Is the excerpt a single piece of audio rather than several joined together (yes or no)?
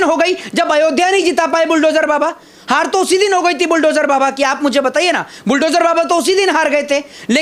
yes